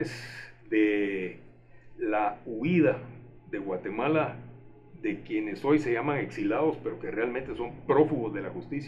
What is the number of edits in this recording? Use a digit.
0